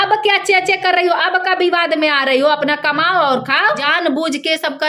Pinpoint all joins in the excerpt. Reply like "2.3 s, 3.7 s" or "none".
3.9 s